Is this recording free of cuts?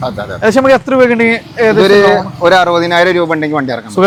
yes; 0 cuts

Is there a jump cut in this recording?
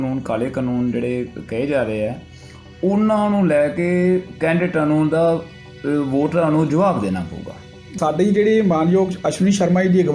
yes; 1 cut; at 7.9 s

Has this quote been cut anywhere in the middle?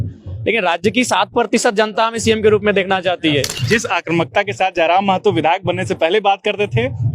yes; 1 cut; at 3.5 s

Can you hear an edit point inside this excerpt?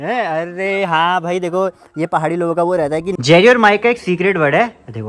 yes; 1 cut; at 3.1 s

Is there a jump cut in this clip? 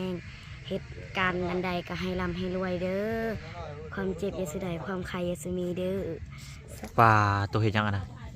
yes; 1 cut; at 6.8 s

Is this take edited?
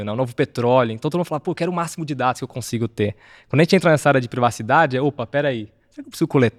no; 0 cuts

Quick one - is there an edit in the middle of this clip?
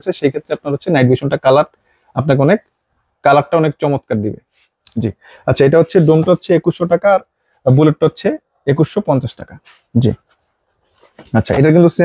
no; 0 cuts

